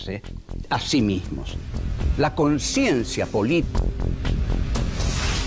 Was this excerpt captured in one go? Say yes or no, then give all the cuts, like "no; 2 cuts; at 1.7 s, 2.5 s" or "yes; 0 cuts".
yes; 0 cuts